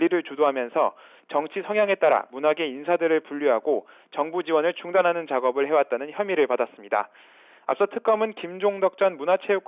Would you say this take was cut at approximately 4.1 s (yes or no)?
no